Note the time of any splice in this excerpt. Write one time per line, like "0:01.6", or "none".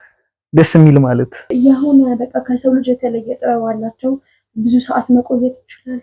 0:01.5